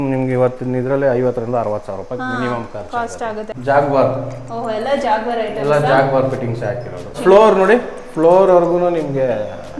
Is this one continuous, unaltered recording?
no; 2 cuts; at 3.5 s, 7.2 s

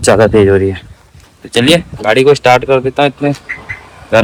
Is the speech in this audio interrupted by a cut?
no; 0 cuts

